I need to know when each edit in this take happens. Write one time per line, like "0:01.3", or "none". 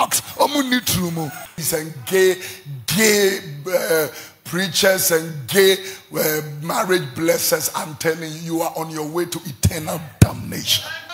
0:01.6